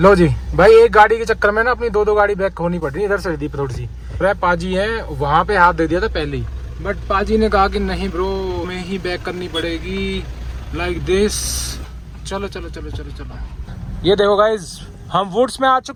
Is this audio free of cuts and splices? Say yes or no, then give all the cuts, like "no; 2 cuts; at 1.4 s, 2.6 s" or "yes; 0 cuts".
yes; 0 cuts